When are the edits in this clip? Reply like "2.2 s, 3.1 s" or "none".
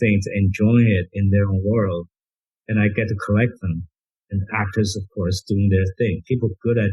none